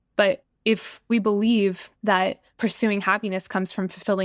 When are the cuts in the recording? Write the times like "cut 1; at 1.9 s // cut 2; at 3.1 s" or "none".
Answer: cut 1; at 1.0 s // cut 2; at 2.2 s